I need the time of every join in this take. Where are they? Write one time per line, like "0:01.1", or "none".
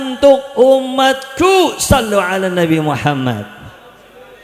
none